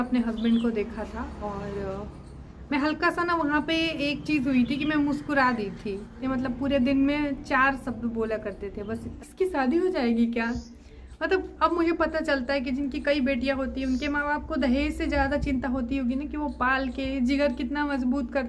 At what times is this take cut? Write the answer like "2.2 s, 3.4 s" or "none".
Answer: 6.2 s, 9.2 s